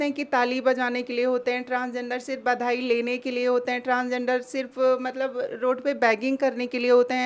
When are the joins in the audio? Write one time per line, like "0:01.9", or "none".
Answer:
none